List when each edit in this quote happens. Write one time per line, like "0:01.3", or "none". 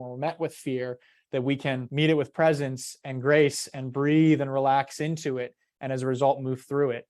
0:01.9